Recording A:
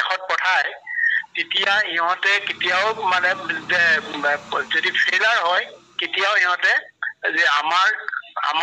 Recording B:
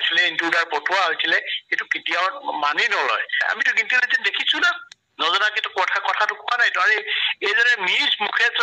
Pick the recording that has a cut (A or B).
B